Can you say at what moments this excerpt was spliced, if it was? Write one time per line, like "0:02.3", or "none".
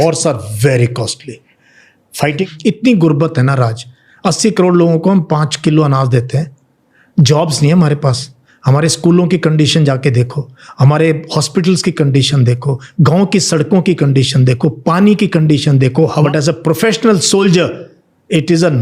0:02.4
0:16.2